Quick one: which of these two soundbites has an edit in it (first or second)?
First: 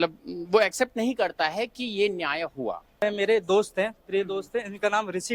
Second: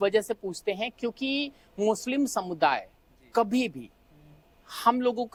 first